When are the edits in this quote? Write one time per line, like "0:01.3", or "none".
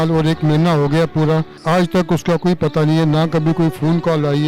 0:01.5